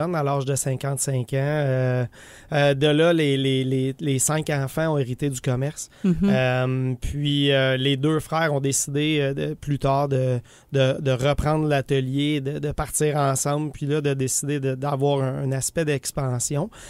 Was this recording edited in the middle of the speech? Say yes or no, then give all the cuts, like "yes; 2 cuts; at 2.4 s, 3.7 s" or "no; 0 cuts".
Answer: yes; 1 cut; at 2.2 s